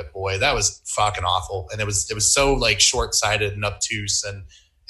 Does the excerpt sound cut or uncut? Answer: uncut